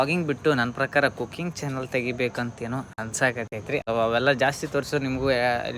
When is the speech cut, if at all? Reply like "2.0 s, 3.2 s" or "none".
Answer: 3.8 s